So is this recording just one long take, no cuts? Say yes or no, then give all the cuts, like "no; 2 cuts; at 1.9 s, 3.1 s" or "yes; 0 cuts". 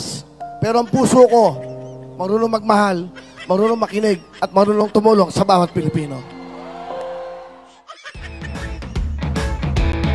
no; 1 cut; at 8.0 s